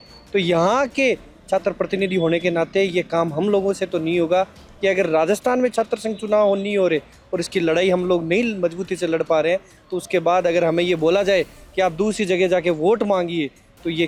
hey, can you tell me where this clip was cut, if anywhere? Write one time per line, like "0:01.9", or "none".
none